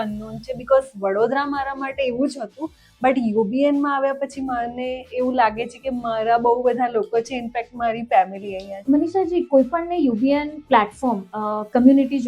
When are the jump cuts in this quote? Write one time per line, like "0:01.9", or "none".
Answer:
0:08.7